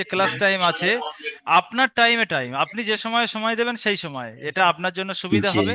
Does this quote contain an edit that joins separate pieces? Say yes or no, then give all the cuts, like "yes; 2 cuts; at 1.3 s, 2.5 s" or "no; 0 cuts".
no; 0 cuts